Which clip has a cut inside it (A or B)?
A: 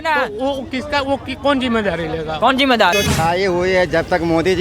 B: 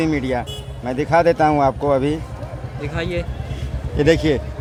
A